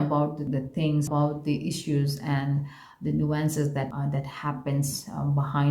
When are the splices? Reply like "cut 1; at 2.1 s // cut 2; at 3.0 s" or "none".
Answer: cut 1; at 1.0 s // cut 2; at 3.9 s